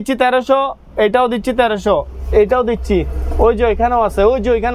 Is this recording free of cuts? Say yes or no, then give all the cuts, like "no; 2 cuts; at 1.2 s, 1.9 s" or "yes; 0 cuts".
yes; 0 cuts